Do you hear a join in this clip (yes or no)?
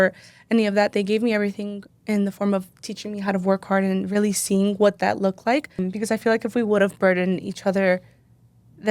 yes